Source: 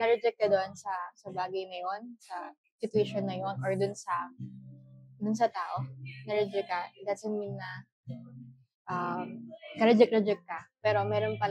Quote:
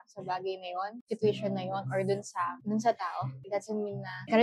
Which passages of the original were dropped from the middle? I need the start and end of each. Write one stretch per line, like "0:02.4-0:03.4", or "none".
0:02.1-0:02.7
0:04.3-0:05.1
0:06.3-0:09.2